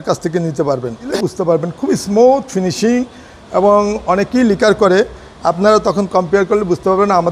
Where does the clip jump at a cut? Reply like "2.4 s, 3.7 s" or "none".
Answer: 1.0 s